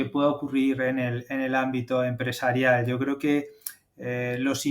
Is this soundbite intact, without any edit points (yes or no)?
yes